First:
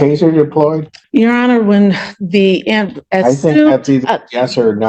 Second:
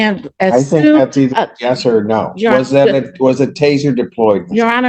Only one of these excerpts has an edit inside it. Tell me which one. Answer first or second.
first